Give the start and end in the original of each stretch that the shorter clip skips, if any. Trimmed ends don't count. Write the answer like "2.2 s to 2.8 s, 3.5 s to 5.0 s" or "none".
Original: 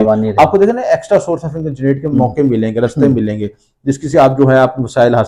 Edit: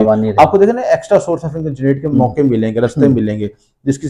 none